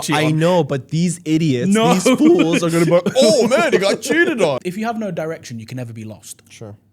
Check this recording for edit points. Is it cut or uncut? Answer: cut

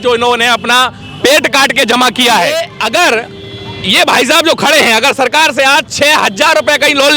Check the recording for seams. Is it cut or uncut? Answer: cut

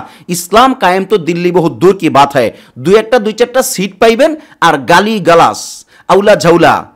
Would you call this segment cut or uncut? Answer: uncut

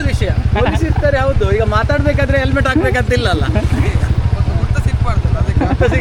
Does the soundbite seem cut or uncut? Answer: uncut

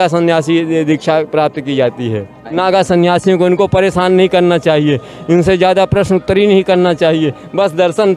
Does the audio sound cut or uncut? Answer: cut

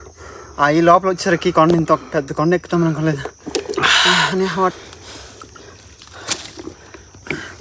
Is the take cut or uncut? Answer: uncut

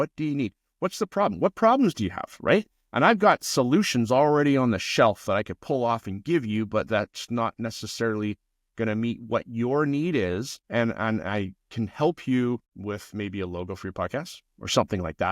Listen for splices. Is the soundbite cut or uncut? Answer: cut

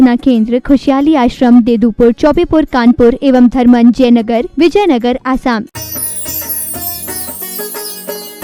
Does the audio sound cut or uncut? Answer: cut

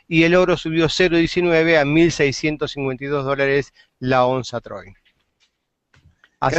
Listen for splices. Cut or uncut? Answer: uncut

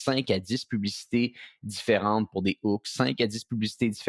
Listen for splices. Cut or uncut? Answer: uncut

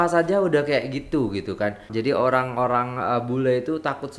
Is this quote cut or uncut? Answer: cut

